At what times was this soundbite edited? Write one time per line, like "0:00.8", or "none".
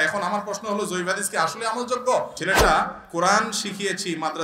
0:02.5